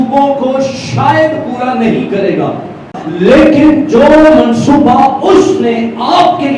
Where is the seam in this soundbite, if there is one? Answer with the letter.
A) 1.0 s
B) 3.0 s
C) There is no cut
B